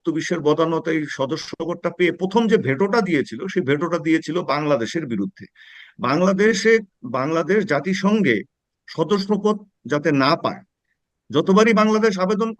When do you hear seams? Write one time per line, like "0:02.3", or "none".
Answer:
none